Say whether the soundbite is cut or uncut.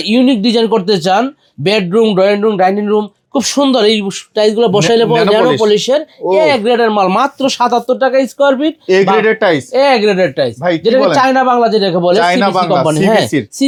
uncut